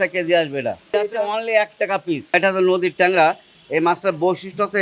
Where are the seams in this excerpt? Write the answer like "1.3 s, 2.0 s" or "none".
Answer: 0.9 s, 2.3 s